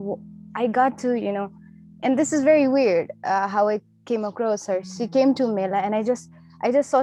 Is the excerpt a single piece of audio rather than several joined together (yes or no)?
yes